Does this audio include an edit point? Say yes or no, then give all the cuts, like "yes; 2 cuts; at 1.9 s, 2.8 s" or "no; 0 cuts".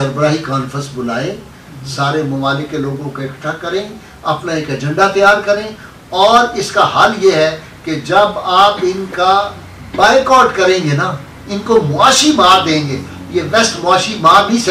no; 0 cuts